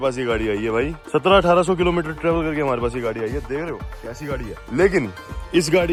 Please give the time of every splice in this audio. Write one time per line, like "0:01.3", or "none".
none